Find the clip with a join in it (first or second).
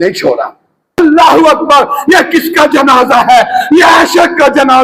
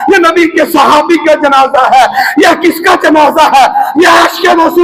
first